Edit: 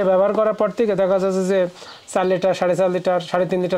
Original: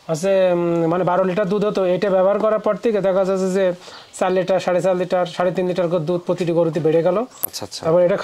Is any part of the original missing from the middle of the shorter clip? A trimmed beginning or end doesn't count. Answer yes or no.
no